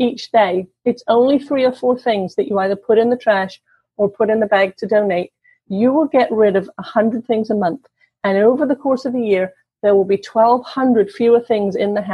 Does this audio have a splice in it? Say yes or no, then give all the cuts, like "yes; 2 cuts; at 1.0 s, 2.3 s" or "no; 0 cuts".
no; 0 cuts